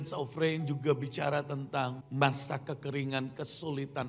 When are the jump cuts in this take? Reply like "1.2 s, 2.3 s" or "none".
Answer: 2.0 s

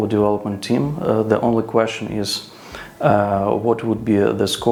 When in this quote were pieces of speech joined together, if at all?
none

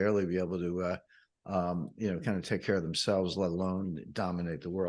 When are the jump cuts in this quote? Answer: none

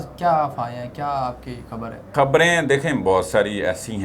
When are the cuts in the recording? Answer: 2.1 s

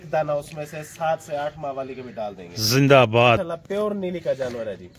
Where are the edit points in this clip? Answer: 3.4 s

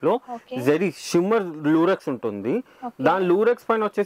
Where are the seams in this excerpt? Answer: none

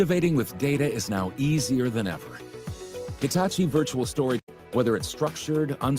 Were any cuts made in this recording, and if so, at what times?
4.5 s

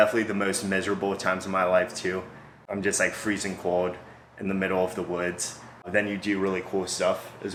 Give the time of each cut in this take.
none

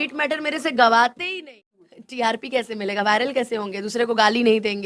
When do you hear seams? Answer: 1.4 s

